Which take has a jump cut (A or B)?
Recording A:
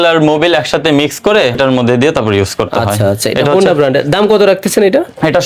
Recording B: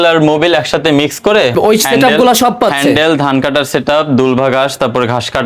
B